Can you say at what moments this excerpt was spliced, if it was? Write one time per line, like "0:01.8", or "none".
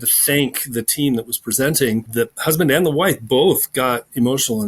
0:02.1